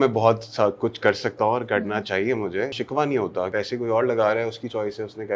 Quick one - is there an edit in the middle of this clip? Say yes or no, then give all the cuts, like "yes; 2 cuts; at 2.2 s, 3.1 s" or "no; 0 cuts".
yes; 2 cuts; at 2.7 s, 3.5 s